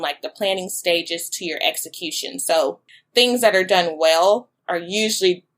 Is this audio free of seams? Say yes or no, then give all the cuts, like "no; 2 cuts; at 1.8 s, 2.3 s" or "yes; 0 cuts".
no; 1 cut; at 2.8 s